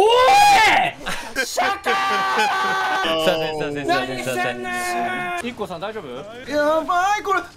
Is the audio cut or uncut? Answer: cut